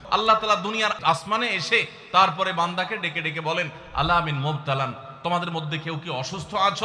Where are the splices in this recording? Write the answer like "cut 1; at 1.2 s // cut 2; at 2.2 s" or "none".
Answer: cut 1; at 1.0 s